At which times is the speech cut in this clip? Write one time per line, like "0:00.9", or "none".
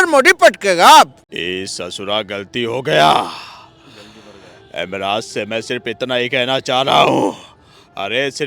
0:01.3